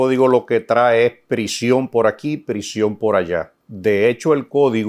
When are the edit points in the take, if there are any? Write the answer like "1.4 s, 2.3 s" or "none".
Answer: none